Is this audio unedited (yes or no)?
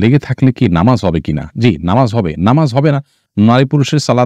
yes